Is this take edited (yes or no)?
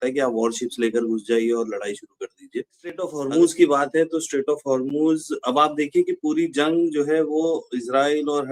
yes